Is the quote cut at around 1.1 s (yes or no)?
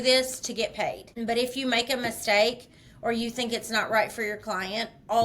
yes